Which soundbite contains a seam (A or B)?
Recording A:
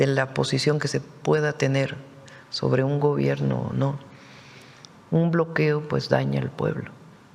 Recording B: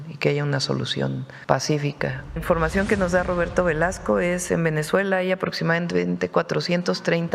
B